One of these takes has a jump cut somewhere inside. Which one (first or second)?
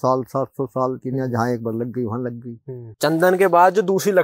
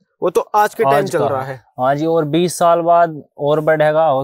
first